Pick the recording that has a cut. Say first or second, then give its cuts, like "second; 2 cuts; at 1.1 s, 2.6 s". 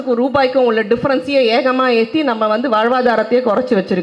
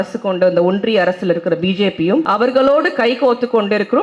second; 1 cut; at 2.3 s